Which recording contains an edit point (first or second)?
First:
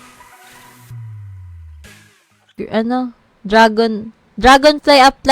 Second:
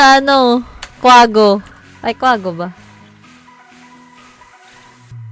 first